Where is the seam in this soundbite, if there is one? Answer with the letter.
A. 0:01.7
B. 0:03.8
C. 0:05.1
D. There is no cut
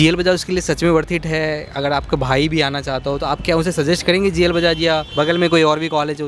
C